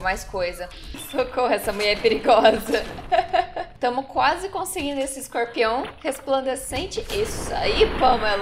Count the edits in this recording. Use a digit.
2